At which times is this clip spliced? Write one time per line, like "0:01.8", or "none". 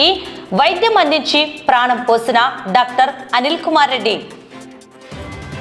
none